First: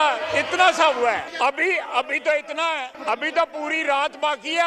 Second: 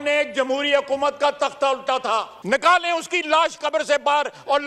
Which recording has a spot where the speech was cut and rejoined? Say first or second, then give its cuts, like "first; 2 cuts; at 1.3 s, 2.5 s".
first; 2 cuts; at 1.3 s, 3.0 s